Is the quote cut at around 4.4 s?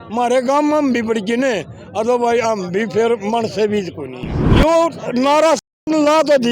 yes; 1 cut; at 4.4 s

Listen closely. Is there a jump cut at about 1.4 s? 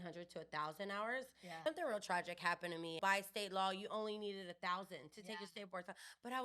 yes; 2 cuts; at 1.4 s, 3.0 s

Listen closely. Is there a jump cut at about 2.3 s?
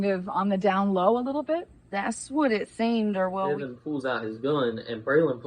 no; 1 cut; at 3.6 s

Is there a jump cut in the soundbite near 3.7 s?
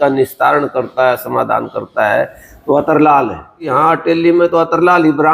yes; 1 cut; at 3.7 s

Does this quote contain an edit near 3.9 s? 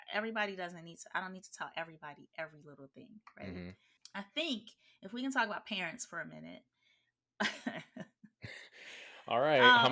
yes; 1 cut; at 3.9 s

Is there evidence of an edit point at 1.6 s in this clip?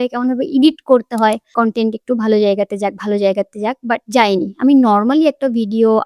yes; 1 cut; at 1.6 s

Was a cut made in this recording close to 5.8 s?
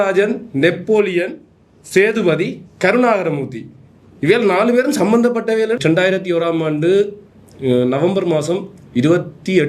yes; 1 cut; at 5.8 s

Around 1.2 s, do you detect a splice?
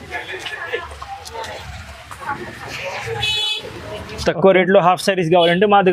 no; 0 cuts

